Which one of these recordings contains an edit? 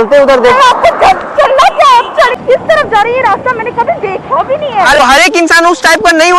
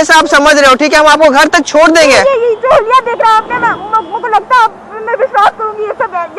first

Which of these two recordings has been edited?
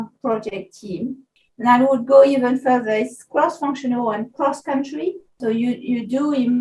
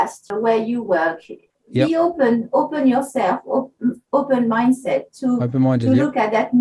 first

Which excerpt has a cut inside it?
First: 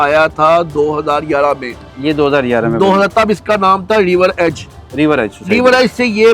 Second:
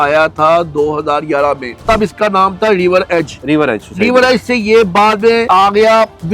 second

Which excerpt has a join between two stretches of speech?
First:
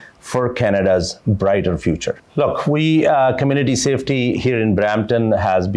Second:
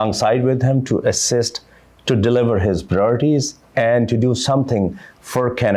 first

